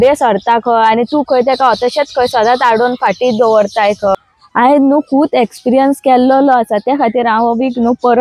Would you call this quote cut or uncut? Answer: cut